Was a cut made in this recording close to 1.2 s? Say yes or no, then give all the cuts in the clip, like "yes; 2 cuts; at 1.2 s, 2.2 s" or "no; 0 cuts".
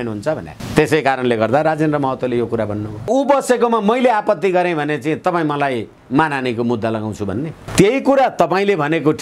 no; 1 cut; at 3.1 s